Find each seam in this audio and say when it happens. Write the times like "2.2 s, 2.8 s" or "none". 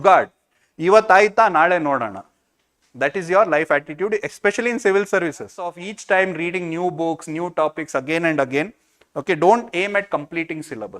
5.9 s